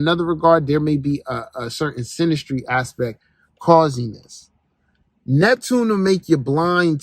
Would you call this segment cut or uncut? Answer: uncut